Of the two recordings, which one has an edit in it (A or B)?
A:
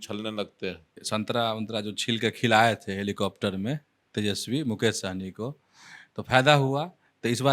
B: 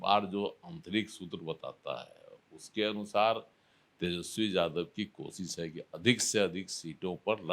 A